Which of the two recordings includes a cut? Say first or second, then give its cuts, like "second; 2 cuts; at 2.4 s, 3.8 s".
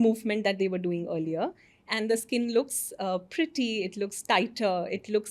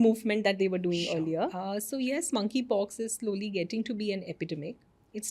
second; 1 cut; at 1.6 s